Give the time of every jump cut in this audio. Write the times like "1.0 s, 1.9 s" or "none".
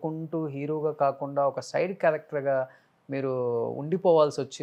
none

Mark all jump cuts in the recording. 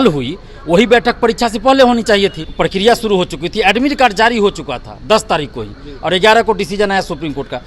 2.5 s

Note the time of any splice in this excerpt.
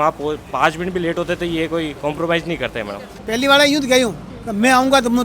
3.1 s

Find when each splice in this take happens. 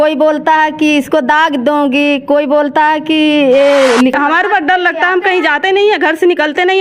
4.2 s

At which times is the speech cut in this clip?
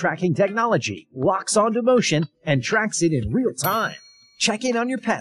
4.3 s

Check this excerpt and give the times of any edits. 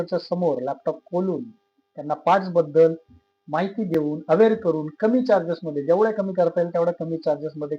none

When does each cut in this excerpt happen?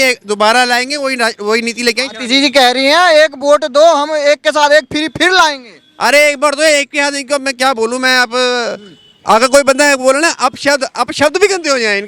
none

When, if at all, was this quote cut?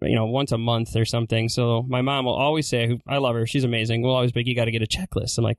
none

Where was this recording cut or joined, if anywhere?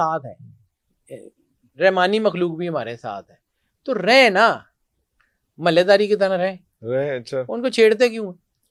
none

